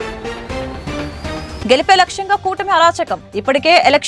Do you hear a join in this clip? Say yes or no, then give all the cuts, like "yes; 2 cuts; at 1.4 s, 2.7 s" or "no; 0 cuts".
yes; 1 cut; at 1.5 s